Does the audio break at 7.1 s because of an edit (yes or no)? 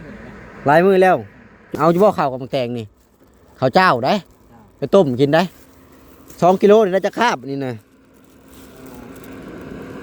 no